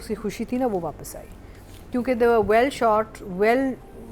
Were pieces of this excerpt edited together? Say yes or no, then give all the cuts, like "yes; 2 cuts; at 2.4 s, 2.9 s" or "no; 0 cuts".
no; 0 cuts